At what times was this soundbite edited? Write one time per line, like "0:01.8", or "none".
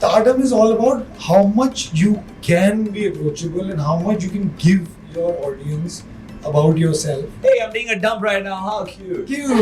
none